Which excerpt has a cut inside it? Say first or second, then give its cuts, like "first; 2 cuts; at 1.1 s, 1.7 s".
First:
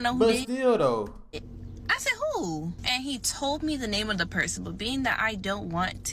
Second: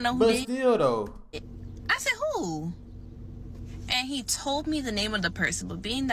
first; 1 cut; at 2.8 s